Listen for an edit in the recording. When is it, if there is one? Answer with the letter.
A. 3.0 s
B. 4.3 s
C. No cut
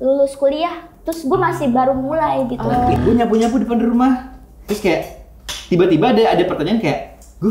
A